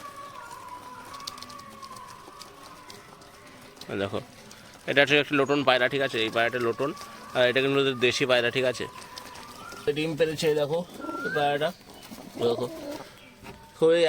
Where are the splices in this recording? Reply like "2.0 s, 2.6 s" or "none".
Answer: 9.9 s